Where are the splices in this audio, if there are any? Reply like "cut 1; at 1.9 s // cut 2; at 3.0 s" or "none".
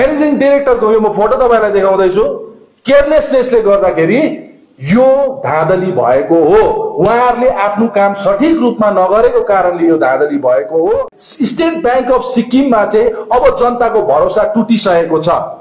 cut 1; at 11.2 s